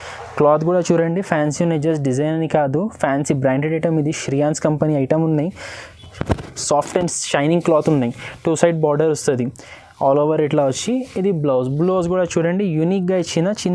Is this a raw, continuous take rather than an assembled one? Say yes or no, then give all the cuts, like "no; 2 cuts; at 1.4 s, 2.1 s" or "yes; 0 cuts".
yes; 0 cuts